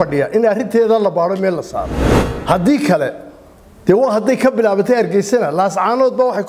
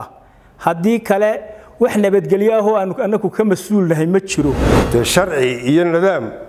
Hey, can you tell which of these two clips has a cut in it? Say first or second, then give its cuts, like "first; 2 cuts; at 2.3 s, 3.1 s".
second; 1 cut; at 4.7 s